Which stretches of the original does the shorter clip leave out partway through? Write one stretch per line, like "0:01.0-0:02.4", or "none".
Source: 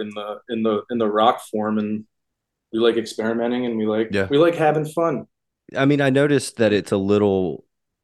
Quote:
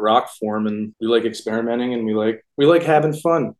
0:02.0-0:02.6